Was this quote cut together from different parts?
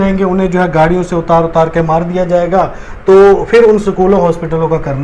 no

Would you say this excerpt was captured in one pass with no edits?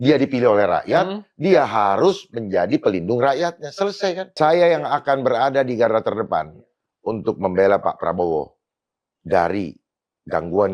no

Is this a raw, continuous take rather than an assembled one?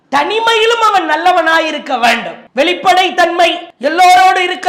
no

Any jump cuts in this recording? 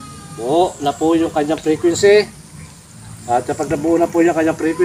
no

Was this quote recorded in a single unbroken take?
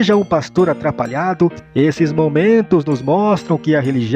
no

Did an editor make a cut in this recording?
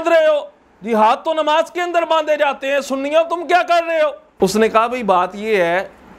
yes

